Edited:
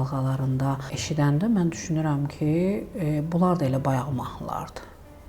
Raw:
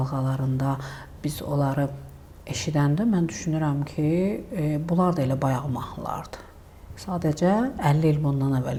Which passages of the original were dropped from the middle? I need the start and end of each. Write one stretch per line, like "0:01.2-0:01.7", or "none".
0:00.9-0:02.5

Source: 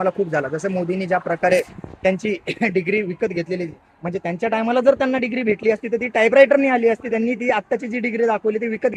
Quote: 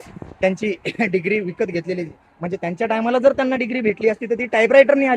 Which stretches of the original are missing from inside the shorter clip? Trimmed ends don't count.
none

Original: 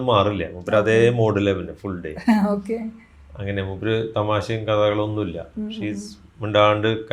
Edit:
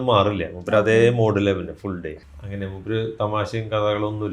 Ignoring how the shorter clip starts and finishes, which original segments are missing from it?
0:02.1-0:03.0

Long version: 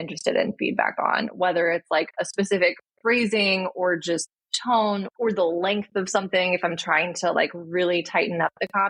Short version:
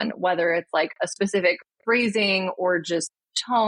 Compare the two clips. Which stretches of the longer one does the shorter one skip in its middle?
none

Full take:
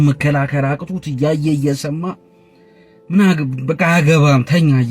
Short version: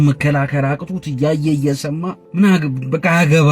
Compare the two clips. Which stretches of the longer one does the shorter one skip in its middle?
0:02.2-0:03.0

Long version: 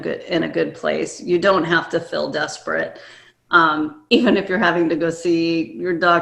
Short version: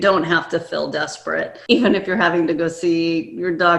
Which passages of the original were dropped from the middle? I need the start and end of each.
0:03.0-0:04.0

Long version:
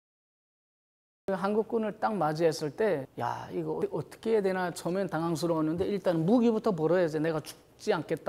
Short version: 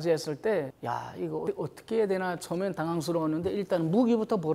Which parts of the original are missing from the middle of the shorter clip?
none

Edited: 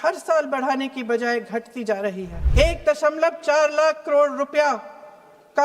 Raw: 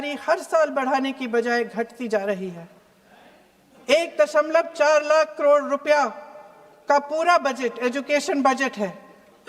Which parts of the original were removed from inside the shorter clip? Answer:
0:02.6-0:03.7

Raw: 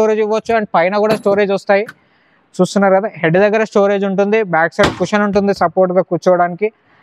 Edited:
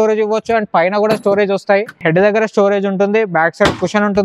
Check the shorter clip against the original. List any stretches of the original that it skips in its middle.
0:02.0-0:03.1

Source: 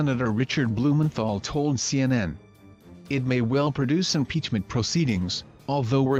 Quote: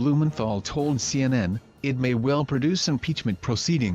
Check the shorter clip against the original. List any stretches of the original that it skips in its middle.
0:02.2-0:02.7

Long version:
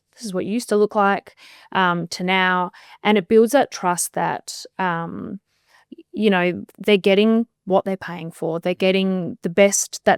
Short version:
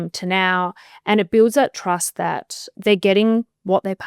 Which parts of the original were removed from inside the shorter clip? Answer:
0:04.6-0:06.7

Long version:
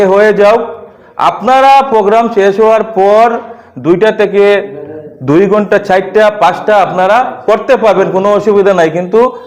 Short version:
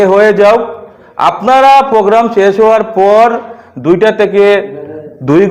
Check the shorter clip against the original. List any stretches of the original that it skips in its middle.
none

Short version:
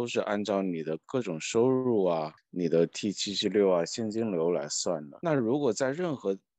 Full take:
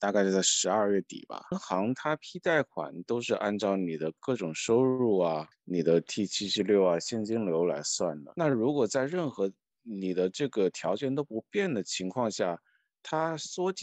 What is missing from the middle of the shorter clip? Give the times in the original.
none

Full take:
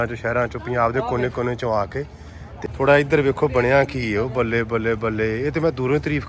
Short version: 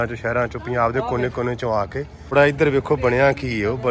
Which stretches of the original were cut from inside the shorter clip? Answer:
0:02.3-0:02.8

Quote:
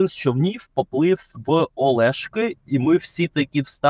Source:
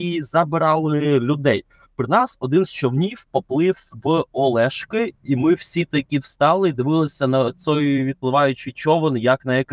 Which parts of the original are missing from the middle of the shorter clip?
none

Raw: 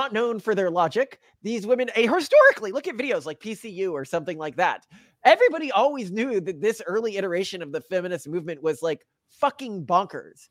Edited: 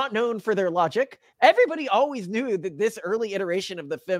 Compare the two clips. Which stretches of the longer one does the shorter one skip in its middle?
0:01.2-0:05.1

